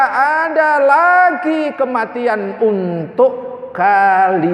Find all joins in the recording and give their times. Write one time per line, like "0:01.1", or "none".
none